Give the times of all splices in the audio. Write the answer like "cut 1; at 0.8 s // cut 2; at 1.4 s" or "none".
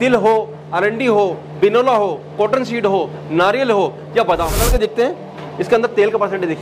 cut 1; at 4.6 s

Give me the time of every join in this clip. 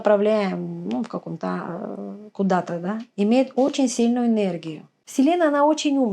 cut 1; at 5.0 s

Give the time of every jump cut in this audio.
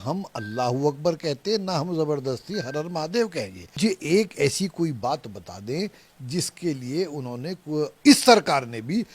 cut 1; at 3.8 s

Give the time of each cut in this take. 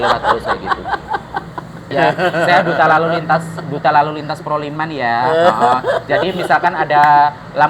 cut 1; at 1.8 s

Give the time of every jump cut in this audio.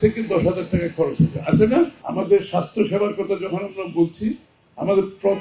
cut 1; at 2.0 s

